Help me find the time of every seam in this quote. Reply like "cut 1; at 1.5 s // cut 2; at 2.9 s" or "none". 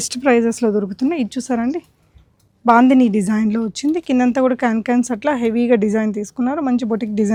none